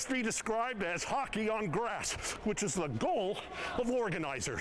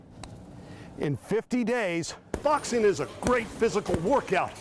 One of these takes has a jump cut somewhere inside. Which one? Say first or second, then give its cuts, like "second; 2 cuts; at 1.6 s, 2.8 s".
second; 1 cut; at 2.3 s